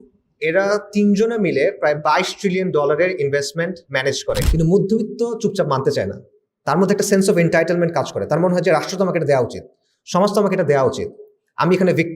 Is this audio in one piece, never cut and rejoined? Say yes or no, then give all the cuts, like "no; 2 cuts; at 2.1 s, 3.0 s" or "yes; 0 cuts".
no; 1 cut; at 4.5 s